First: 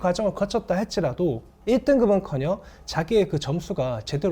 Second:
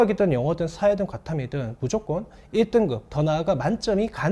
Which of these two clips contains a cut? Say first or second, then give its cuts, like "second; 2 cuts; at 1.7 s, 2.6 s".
first; 1 cut; at 1.5 s